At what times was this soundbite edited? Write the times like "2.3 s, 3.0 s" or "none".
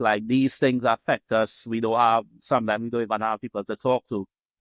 none